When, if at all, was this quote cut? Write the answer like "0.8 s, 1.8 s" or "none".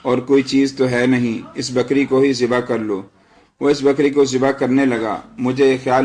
none